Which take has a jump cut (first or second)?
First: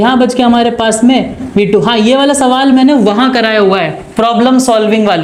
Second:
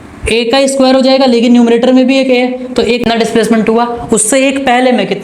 second